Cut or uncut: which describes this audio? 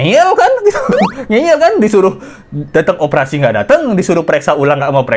uncut